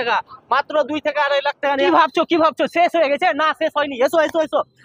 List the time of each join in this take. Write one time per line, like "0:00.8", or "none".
0:01.9